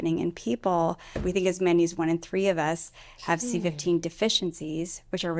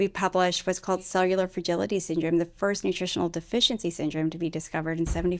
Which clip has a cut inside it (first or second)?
first